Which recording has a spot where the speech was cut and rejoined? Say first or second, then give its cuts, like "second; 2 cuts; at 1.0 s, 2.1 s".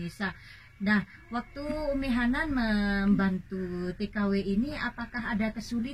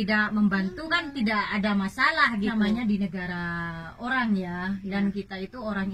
second; 1 cut; at 2.5 s